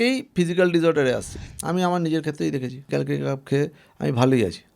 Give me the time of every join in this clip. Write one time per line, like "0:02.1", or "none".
0:01.3
0:02.9